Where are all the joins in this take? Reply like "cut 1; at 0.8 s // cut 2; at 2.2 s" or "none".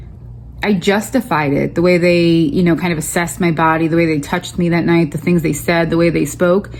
none